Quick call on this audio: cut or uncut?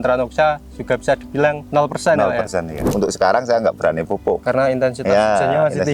cut